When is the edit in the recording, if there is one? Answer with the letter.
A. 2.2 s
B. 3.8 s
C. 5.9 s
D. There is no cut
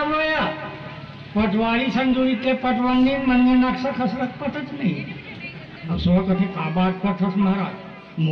C